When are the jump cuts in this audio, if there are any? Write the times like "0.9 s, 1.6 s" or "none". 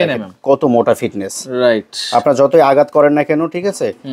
none